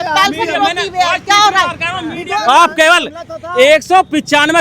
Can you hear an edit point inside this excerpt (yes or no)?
yes